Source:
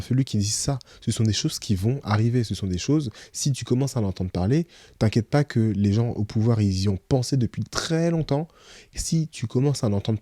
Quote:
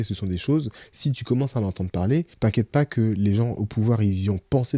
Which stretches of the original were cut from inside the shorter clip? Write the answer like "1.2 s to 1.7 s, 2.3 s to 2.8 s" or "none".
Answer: 4.7 s to 4.9 s